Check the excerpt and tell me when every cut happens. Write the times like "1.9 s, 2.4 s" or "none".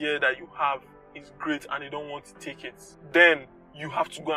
2.9 s